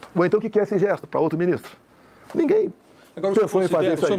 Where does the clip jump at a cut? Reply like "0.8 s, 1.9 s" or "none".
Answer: none